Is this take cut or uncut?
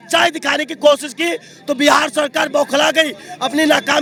uncut